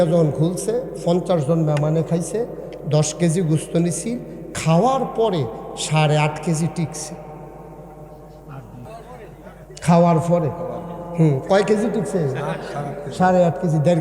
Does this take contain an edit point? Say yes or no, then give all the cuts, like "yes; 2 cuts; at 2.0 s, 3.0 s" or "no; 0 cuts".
yes; 1 cut; at 8.9 s